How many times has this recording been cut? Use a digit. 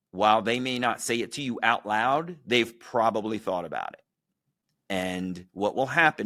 0